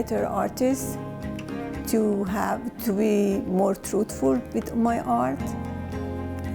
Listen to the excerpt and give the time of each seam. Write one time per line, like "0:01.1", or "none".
none